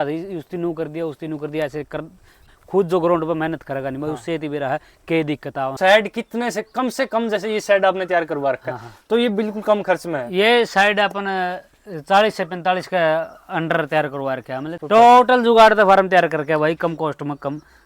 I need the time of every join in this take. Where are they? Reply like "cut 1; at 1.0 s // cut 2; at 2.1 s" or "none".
cut 1; at 2.5 s // cut 2; at 5.7 s // cut 3; at 14.8 s